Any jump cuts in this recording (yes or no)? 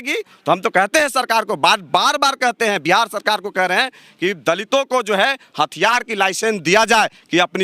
no